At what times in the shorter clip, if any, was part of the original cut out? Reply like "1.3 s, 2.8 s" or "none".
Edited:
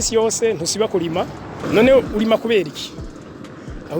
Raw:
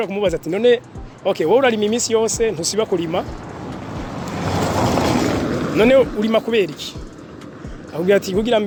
1.6 s